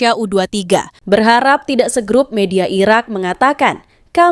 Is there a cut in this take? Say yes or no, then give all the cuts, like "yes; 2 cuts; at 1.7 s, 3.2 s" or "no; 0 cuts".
yes; 1 cut; at 0.9 s